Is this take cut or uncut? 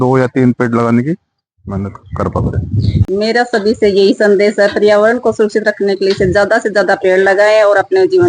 cut